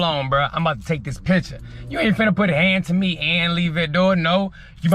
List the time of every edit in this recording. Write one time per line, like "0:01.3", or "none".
none